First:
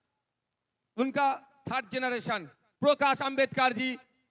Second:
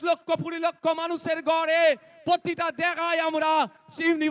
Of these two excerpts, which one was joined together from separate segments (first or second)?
first